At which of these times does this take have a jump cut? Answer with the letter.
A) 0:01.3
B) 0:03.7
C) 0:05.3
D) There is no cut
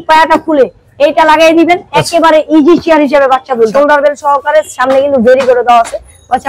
B